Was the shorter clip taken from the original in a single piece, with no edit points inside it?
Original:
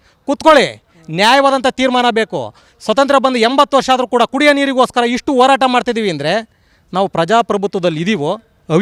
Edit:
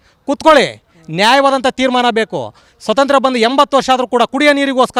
yes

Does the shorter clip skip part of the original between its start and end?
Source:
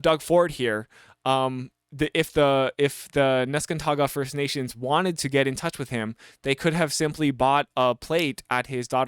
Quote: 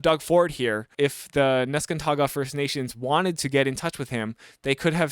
yes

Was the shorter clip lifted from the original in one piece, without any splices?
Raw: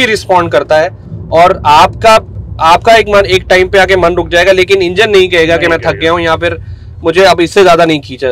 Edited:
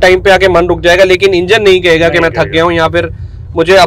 yes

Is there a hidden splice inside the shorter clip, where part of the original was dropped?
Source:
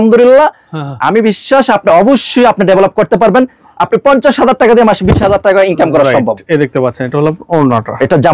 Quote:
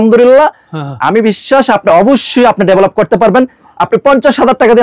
no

